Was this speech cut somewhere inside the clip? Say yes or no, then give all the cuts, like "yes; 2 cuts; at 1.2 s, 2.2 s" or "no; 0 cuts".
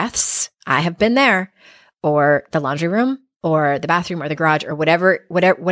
no; 0 cuts